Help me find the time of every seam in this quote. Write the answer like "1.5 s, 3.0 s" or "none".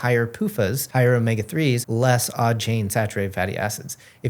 0.8 s, 1.8 s